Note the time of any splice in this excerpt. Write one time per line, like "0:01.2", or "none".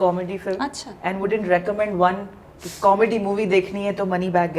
none